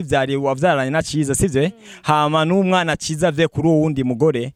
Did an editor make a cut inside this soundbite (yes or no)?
no